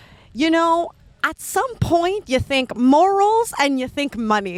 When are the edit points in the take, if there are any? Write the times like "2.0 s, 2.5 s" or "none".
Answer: none